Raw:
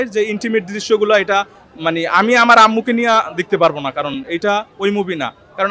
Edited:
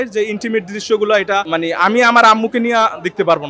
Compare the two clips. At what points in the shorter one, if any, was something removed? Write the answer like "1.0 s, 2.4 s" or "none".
1.5 s